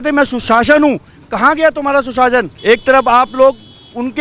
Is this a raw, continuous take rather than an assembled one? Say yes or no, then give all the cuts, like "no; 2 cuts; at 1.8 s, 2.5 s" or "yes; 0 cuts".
no; 1 cut; at 2.5 s